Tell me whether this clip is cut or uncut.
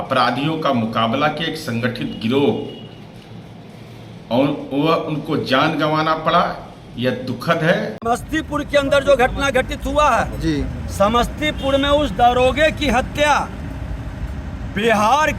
cut